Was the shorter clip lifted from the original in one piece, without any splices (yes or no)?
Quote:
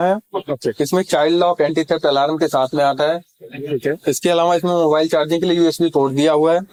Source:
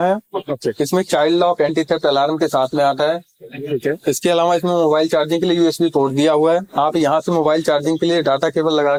yes